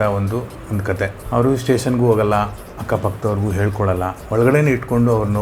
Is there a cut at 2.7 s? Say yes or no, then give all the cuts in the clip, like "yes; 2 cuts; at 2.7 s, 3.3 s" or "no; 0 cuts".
no; 2 cuts; at 1.2 s, 4.2 s